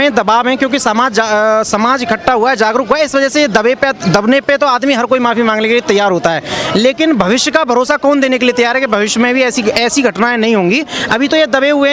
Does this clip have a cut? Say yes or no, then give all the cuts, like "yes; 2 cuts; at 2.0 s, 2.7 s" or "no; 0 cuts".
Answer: no; 0 cuts